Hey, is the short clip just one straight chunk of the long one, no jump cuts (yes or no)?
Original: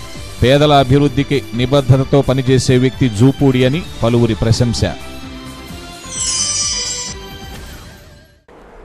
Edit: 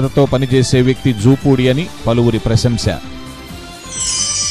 no